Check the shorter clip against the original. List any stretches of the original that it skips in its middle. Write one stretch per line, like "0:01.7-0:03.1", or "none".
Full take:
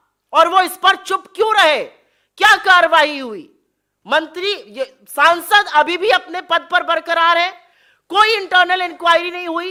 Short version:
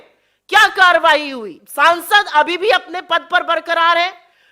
0:03.5-0:05.0